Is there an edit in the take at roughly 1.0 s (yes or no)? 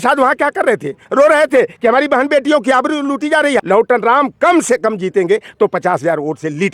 yes